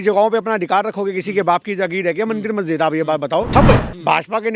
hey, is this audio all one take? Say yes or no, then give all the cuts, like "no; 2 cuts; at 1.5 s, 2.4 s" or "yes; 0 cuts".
no; 1 cut; at 3.5 s